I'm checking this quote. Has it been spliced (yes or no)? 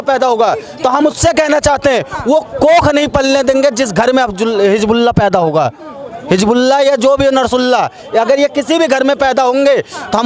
no